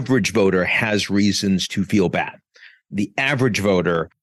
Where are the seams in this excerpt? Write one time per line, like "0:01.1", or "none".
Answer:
none